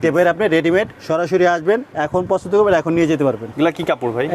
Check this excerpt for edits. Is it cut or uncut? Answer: cut